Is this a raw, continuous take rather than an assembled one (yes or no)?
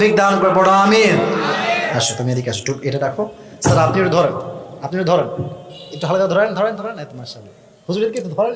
no